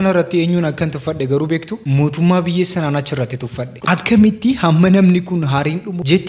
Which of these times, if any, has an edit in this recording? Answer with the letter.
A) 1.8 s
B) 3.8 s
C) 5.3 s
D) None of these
B